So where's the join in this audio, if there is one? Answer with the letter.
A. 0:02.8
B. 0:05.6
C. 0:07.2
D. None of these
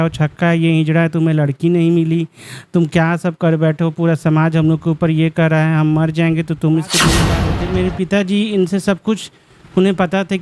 C